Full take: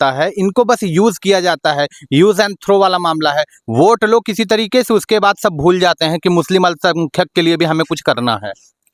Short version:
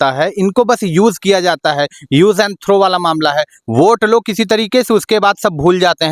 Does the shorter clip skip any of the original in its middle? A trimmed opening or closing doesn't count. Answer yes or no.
no